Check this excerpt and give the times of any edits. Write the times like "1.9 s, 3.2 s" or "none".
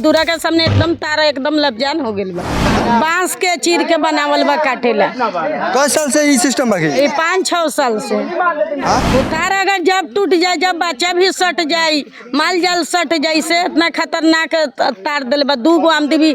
2.7 s, 9.0 s